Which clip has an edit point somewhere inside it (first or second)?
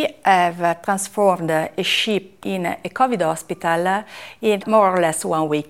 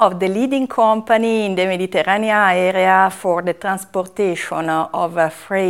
first